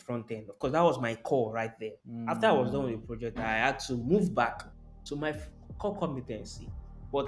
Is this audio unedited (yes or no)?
yes